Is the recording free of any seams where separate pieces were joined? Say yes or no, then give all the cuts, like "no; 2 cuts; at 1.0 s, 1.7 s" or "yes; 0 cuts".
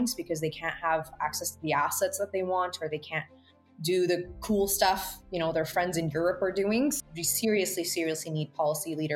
no; 1 cut; at 7.0 s